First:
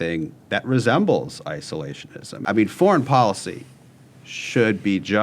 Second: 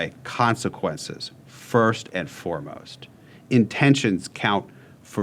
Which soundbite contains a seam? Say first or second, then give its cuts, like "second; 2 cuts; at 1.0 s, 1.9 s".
first; 1 cut; at 2.4 s